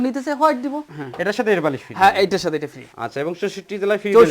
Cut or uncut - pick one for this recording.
cut